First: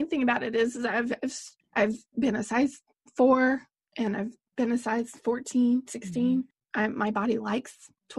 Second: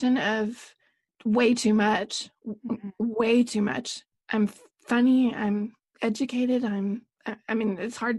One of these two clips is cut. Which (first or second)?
first